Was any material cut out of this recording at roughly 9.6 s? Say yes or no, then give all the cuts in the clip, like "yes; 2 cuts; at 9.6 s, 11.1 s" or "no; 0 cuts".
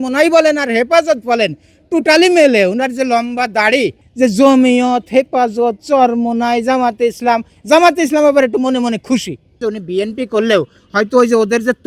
yes; 2 cuts; at 4.0 s, 9.6 s